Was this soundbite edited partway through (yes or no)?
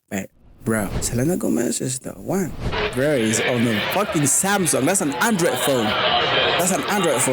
yes